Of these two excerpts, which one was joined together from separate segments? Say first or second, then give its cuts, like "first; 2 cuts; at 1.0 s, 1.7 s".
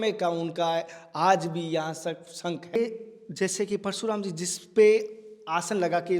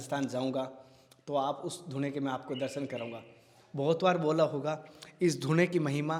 first; 1 cut; at 2.8 s